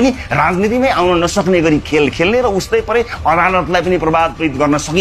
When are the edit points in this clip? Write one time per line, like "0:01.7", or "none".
none